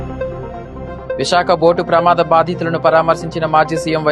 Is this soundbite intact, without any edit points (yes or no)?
no